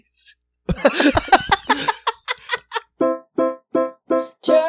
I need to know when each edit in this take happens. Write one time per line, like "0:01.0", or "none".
0:02.9